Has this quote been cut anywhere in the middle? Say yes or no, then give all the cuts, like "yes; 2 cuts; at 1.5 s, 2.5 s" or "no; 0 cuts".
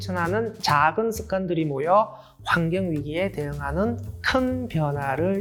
no; 0 cuts